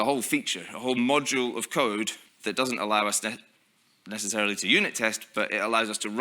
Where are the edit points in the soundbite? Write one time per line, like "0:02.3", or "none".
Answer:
0:02.3

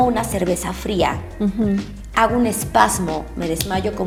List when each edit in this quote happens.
none

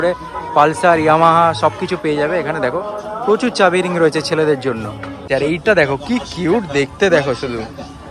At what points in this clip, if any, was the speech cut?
0:05.3

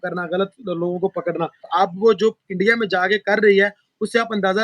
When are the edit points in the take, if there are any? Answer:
0:01.7

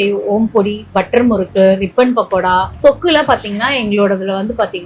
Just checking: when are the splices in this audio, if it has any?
0:02.7

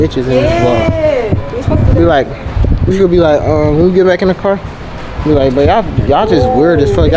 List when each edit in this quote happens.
none

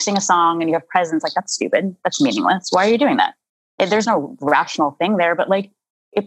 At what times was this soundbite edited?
0:04.0

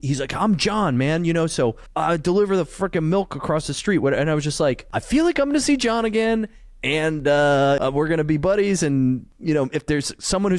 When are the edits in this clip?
0:01.9
0:04.9
0:07.8
0:09.3

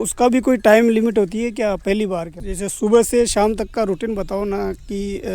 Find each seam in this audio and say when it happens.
0:02.4

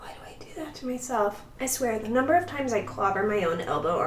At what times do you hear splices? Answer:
0:01.5

